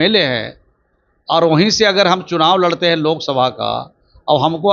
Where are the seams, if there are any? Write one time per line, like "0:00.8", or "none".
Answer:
none